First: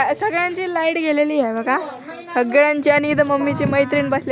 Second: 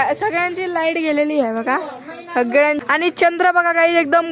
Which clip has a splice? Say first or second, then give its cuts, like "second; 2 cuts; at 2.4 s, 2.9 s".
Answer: second; 1 cut; at 2.8 s